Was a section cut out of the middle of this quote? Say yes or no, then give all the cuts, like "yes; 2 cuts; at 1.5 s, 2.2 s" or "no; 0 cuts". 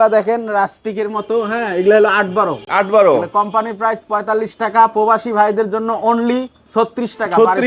no; 0 cuts